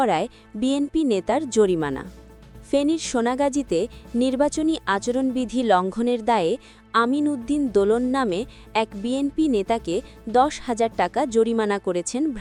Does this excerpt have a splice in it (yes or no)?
no